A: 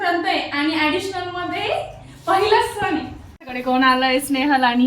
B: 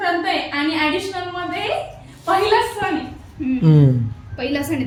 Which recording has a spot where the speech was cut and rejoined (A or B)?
A